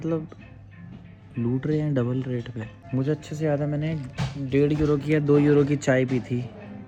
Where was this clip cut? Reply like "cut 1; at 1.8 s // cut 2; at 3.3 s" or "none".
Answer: none